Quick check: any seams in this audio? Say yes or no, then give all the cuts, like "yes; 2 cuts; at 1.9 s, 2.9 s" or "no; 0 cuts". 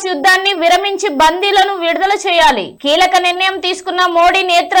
no; 0 cuts